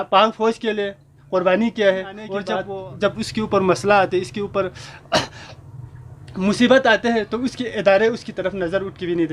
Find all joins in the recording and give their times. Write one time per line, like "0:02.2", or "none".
0:02.6